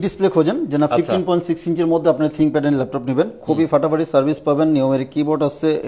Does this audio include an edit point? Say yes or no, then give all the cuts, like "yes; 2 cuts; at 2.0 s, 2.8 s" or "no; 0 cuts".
no; 0 cuts